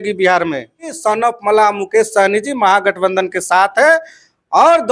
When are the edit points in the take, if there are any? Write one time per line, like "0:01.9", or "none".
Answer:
0:00.9